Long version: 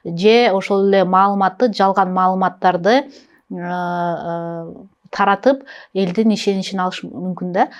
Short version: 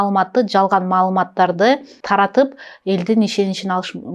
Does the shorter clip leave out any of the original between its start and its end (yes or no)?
yes